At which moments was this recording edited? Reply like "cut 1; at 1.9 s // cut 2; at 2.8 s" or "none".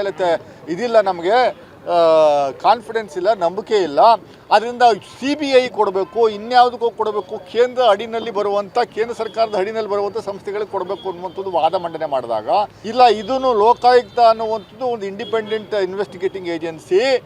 cut 1; at 12.8 s